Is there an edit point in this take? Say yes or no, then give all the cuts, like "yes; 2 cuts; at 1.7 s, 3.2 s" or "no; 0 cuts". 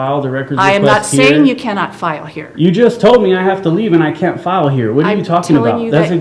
no; 0 cuts